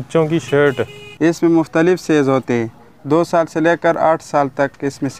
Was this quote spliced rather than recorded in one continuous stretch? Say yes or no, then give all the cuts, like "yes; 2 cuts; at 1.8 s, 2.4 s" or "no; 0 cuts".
yes; 1 cut; at 1.0 s